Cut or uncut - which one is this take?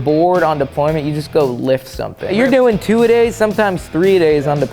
cut